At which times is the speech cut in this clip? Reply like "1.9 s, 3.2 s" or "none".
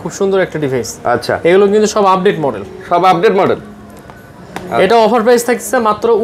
none